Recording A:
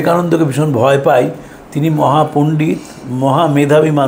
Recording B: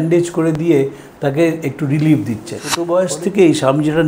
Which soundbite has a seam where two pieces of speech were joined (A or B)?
B